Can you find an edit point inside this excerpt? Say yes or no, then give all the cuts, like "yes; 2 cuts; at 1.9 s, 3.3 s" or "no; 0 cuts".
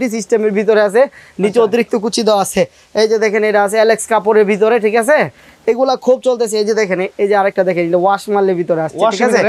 no; 0 cuts